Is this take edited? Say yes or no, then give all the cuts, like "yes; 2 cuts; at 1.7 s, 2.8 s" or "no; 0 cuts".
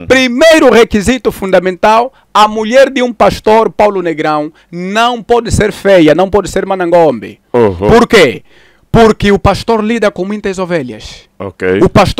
no; 0 cuts